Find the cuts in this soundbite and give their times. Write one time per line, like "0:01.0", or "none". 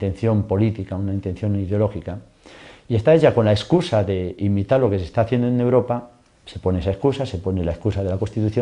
none

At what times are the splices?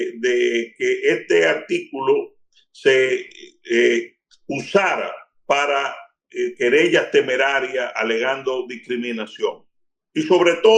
none

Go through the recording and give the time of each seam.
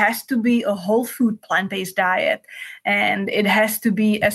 none

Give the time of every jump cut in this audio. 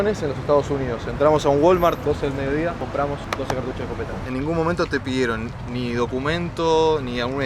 none

